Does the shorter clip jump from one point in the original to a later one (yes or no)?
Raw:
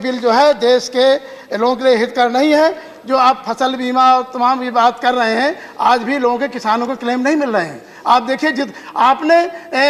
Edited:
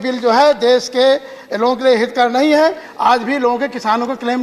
yes